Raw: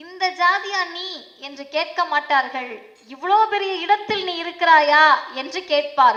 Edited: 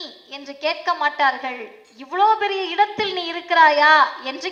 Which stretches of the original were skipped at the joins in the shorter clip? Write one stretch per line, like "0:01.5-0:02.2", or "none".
none

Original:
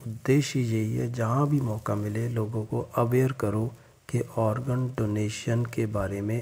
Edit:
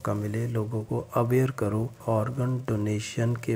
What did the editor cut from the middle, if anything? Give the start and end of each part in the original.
0:03.8-0:04.3

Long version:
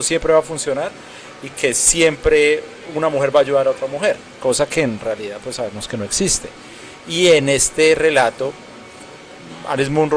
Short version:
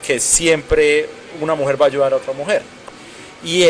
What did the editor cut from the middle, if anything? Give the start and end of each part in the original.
0:04.3-0:06.4

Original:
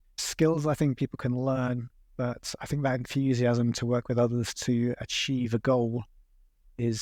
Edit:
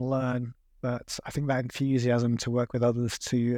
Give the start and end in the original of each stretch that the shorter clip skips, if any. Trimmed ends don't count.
none

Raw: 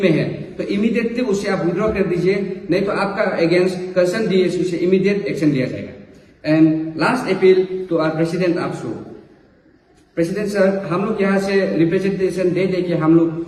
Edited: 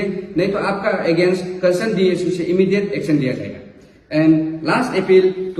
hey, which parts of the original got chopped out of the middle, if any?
none

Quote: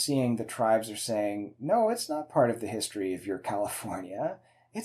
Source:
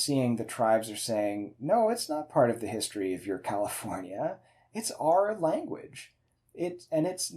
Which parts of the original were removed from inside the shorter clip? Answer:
none

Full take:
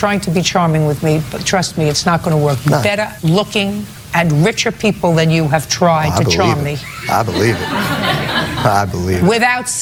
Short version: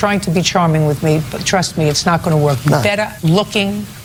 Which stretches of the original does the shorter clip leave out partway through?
none

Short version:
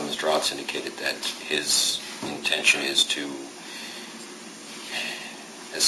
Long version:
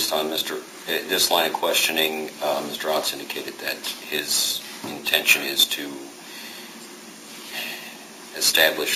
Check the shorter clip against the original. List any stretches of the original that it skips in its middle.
none

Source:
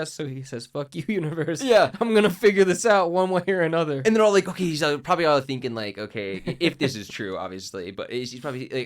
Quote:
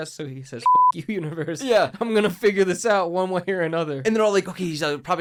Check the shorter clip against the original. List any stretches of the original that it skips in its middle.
none

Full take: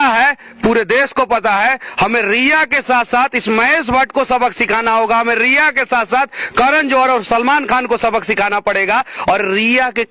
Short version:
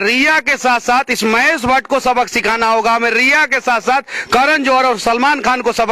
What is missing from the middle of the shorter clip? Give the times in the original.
none

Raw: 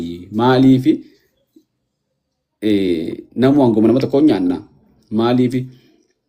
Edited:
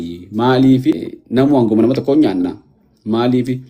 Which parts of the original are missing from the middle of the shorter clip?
0:01.1-0:03.2

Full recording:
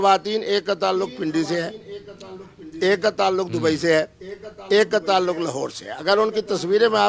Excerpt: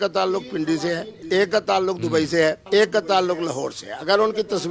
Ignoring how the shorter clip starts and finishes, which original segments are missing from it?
0:01.8-0:02.6
0:04.1-0:04.6

